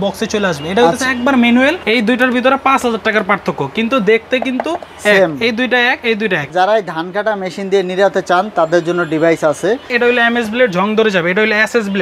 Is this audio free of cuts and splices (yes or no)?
no